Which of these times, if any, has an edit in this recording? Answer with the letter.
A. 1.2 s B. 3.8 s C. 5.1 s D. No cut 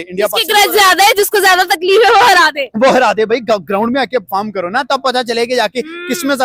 D